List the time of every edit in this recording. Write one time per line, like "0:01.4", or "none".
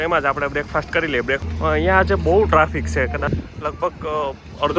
0:01.4
0:03.3